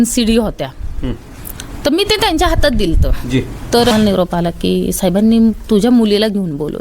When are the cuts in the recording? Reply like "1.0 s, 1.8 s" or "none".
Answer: 3.9 s